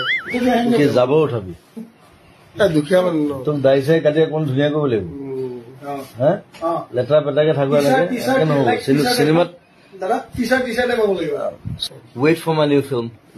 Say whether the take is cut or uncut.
cut